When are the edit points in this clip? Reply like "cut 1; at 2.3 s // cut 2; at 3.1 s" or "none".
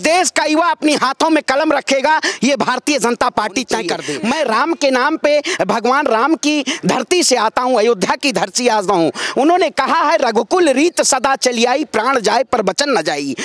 cut 1; at 4.1 s